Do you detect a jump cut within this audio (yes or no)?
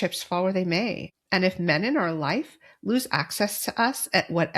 no